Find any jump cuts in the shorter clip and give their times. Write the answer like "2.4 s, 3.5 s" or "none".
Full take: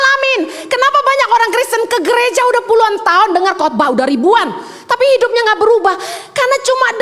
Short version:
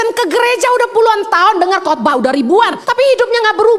2.8 s

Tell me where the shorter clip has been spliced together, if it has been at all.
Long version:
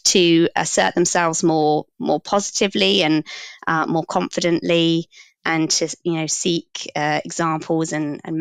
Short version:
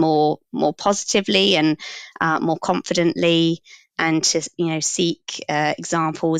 none

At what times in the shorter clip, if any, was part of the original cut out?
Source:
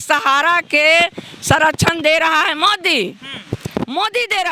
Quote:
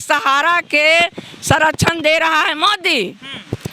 none

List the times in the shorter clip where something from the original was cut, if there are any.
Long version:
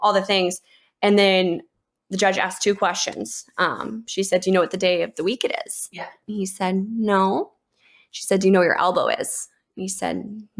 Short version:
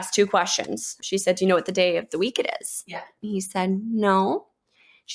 0.9 s

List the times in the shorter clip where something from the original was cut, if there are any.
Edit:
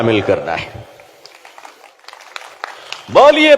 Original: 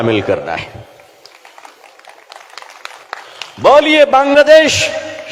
2.0 s

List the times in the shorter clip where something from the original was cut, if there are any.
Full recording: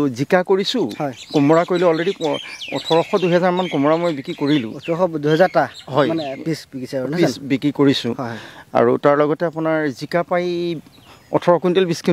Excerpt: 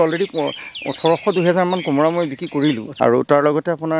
2.9 s

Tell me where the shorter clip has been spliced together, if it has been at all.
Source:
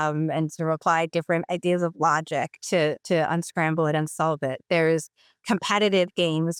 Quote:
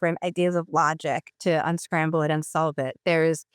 1.3 s

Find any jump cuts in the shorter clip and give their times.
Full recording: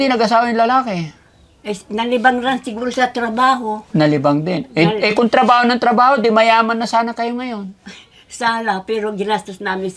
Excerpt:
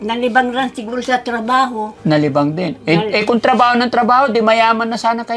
none

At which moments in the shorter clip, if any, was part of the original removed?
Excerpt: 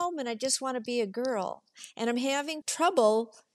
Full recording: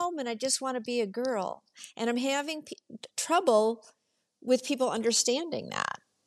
2.6 s

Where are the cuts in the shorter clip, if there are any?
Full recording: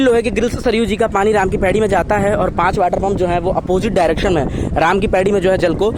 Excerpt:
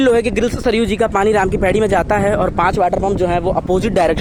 none

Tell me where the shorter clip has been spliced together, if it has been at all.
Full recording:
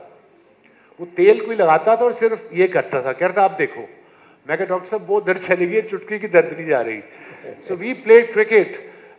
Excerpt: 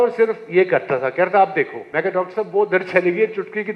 1.8 s

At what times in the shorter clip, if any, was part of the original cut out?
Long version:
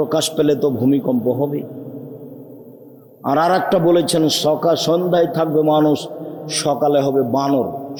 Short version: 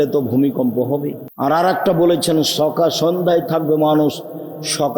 1.2 s

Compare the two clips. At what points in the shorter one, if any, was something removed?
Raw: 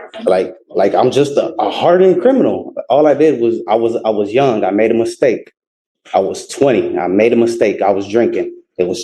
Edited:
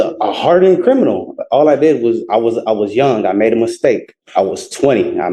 4.1 s

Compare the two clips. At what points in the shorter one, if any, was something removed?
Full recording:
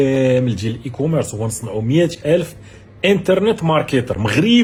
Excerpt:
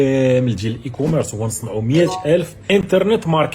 2.6 s

